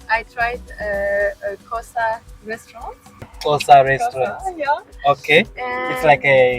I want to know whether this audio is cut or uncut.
cut